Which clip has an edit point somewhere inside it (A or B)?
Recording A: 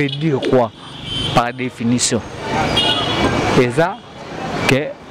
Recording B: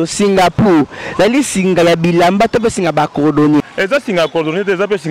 B